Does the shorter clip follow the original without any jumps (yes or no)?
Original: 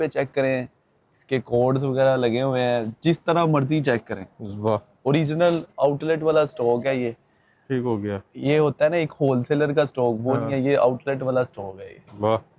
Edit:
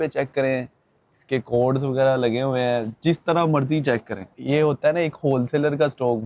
no